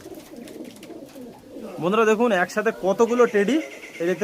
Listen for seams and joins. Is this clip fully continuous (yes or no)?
no